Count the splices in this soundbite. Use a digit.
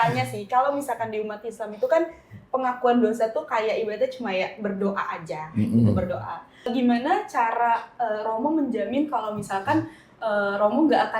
1